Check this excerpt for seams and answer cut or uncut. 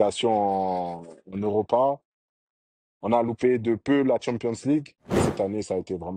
cut